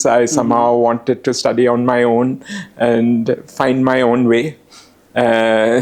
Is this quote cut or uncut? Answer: uncut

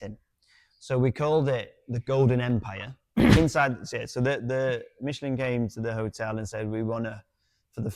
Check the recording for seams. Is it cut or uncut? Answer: cut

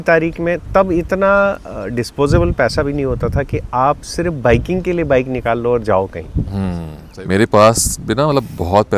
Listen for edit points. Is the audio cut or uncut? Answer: cut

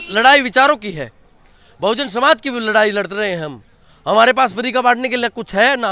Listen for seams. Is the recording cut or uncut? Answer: uncut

